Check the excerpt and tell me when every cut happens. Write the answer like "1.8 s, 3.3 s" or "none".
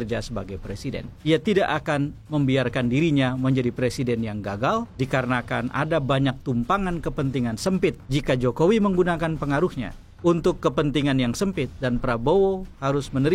1.1 s, 8.0 s